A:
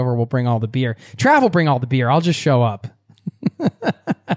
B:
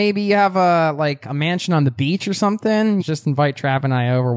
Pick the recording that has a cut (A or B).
B